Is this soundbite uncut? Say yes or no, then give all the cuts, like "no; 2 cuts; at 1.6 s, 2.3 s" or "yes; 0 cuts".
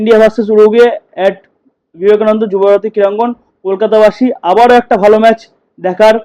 yes; 0 cuts